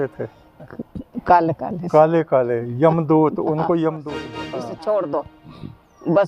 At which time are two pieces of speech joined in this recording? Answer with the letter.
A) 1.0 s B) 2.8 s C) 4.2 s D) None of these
C